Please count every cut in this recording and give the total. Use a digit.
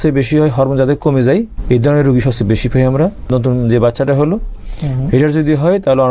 2